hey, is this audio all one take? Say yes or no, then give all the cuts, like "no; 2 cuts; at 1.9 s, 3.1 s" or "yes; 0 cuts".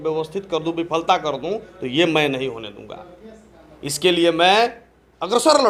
yes; 0 cuts